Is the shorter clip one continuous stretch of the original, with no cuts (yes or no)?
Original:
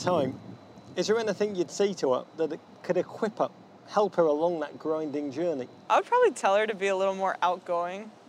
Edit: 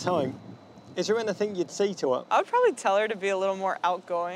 no